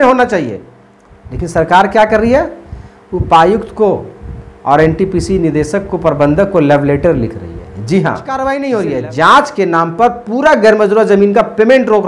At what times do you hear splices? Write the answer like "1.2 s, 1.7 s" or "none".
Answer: 8.3 s